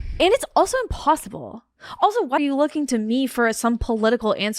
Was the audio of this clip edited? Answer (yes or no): yes